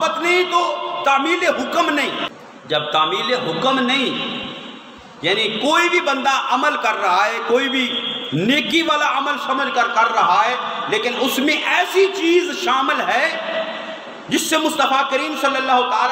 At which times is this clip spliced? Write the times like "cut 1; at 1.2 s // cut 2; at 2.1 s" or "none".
cut 1; at 2.3 s